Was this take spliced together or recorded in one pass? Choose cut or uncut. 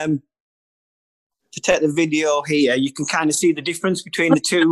uncut